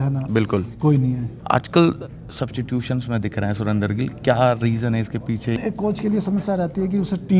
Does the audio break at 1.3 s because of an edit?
yes; 2 cuts; at 1.3 s, 5.6 s

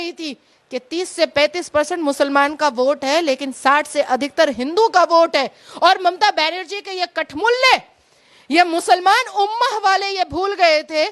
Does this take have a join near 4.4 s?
no; 0 cuts

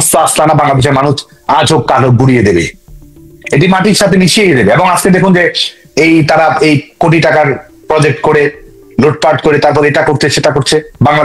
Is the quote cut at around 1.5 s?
no; 0 cuts

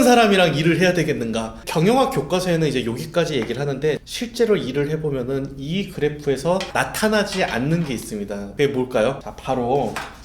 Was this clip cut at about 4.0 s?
yes; 5 cuts; at 1.6 s, 4.0 s, 6.7 s, 8.4 s, 9.3 s

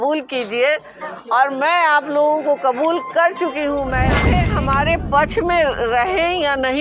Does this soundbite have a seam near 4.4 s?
yes; 1 cut; at 4.4 s

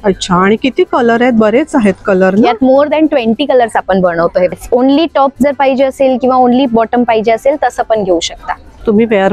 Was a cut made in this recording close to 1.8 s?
no; 1 cut; at 4.6 s

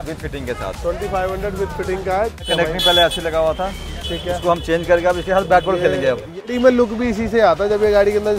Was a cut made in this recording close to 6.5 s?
yes; 2 cuts; at 2.4 s, 6.5 s

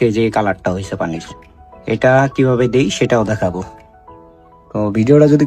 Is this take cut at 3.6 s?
no; 0 cuts

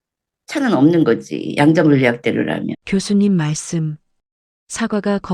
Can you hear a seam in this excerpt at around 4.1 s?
no; 1 cut; at 2.8 s

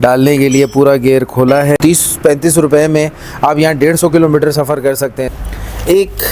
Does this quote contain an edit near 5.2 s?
yes; 2 cuts; at 1.8 s, 5.2 s

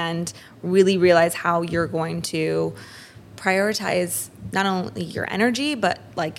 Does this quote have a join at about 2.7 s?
no; 0 cuts

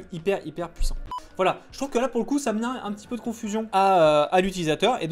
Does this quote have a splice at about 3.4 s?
no; 1 cut; at 1.2 s

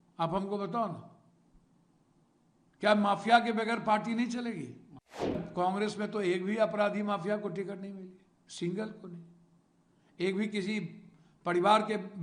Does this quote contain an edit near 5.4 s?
yes; 1 cut; at 5.4 s

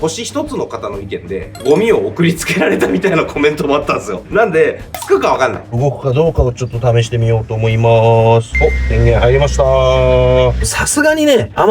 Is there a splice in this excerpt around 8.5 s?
yes; 5 cuts; at 1.4 s, 4.2 s, 5.8 s, 8.5 s, 10.6 s

